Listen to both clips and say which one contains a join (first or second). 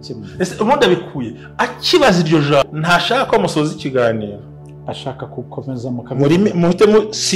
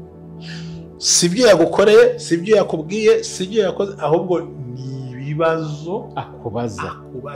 first